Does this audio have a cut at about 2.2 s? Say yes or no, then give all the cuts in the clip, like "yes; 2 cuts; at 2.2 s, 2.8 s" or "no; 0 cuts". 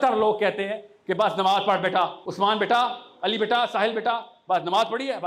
yes; 1 cut; at 2.2 s